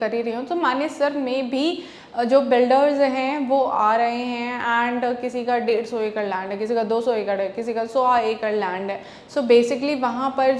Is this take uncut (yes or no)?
yes